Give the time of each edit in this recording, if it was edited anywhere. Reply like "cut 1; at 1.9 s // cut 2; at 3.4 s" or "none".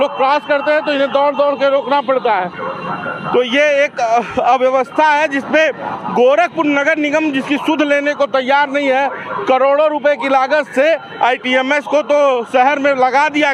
none